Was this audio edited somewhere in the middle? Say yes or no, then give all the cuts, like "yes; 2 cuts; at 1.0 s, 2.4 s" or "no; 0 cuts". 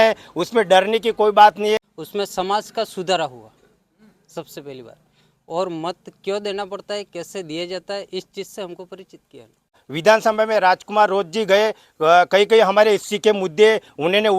yes; 2 cuts; at 2.0 s, 9.9 s